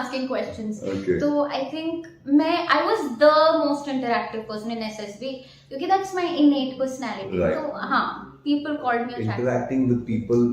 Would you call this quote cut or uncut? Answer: cut